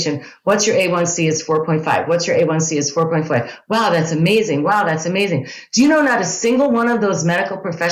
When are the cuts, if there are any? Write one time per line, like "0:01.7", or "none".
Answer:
none

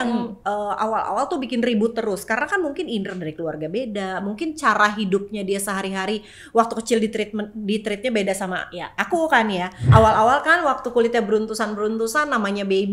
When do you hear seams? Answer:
0:09.8

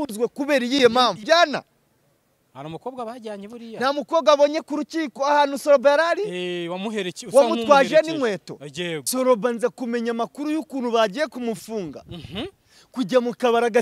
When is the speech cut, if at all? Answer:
0:01.2
0:09.1

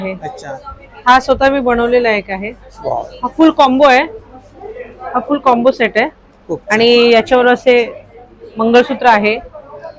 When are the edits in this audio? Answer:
none

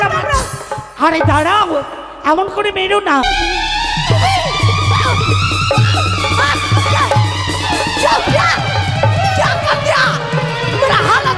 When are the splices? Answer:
0:03.2

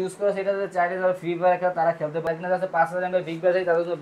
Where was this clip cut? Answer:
0:02.3

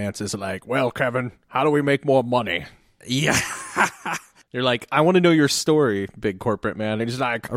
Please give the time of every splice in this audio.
0:01.4

